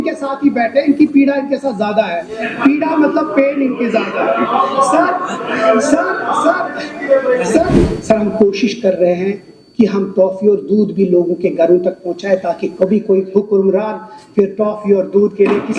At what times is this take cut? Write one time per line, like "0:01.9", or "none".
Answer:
0:07.8